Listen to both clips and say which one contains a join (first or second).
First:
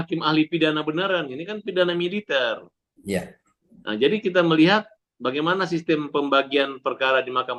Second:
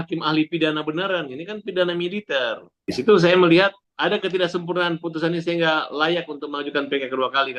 second